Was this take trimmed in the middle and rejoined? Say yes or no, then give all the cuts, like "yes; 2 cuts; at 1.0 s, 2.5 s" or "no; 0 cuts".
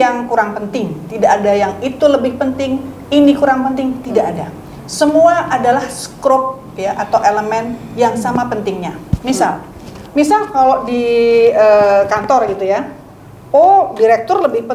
no; 0 cuts